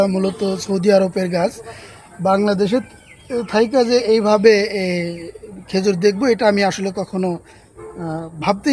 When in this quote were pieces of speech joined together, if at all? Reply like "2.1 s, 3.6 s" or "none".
none